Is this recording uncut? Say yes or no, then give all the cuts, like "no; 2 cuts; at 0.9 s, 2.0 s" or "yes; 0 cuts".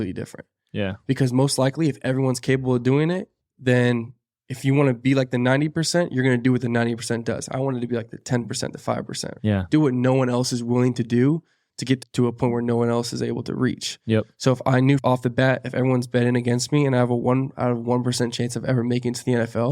no; 2 cuts; at 9.3 s, 12.0 s